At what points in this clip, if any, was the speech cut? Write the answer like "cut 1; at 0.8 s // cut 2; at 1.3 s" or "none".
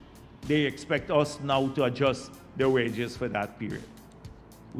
none